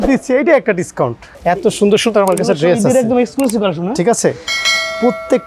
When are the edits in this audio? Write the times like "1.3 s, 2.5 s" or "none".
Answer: 1.2 s